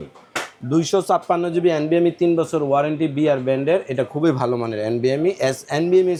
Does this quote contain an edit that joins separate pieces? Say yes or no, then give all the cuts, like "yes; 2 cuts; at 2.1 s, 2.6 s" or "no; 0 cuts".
no; 0 cuts